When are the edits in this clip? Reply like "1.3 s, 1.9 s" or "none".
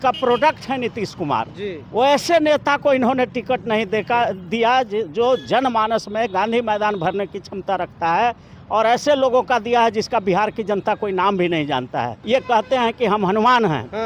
12.2 s